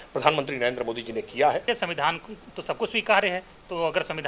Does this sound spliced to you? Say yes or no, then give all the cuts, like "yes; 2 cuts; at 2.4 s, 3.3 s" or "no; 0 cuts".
yes; 1 cut; at 1.6 s